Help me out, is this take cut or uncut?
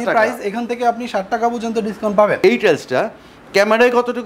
cut